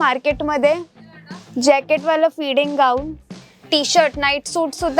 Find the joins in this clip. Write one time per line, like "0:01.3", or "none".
0:03.4